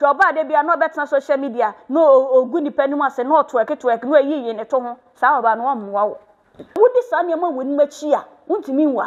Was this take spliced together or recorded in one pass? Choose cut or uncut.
cut